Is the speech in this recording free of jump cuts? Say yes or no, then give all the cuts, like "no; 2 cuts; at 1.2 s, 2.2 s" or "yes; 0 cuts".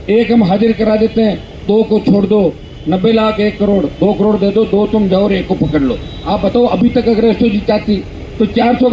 yes; 0 cuts